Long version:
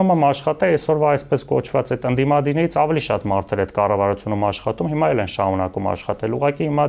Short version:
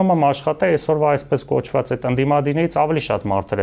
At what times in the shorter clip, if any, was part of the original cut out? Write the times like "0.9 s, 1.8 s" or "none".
none